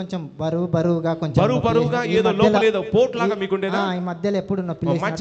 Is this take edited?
no; 0 cuts

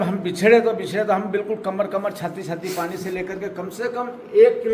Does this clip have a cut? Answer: no; 0 cuts

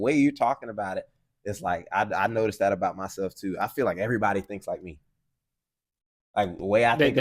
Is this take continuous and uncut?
yes; 0 cuts

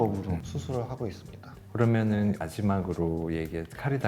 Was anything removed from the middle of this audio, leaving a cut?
no; 0 cuts

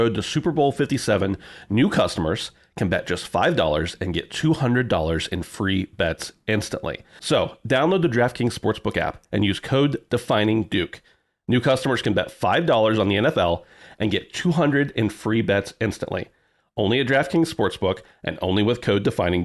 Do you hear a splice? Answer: yes; 1 cut; at 7.1 s

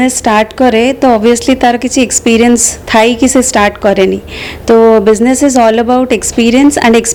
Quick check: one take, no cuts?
yes; 0 cuts

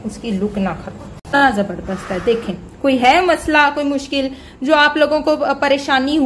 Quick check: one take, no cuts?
no; 1 cut; at 1.4 s

